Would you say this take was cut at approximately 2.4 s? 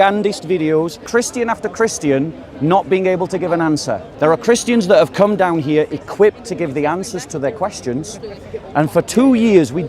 no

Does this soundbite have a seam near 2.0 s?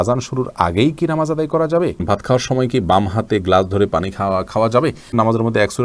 yes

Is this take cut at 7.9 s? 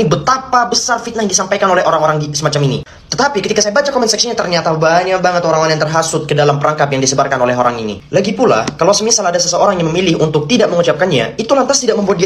yes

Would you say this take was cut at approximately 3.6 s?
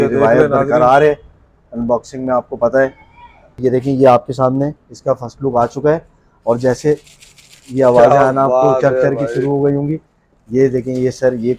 yes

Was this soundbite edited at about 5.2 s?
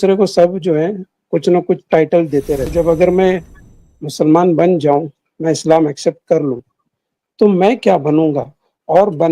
no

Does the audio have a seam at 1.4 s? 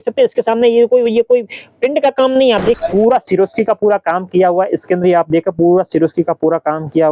no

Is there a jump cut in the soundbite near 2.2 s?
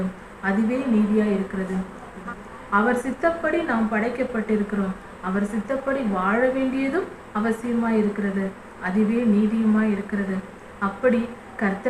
yes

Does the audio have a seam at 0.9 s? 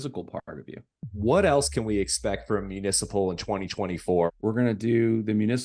yes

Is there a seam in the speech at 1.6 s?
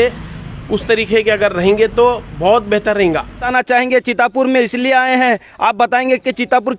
no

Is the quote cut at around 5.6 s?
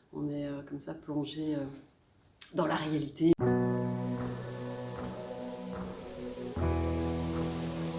no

